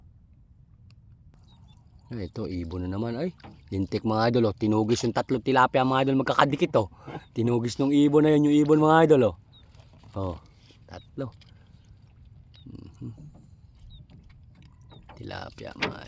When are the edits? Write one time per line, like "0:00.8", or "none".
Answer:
0:01.4